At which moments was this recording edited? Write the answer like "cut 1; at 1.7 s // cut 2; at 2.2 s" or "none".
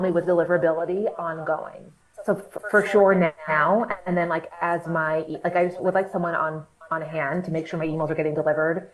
none